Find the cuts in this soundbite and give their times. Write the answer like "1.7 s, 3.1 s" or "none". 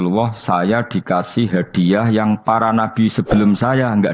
none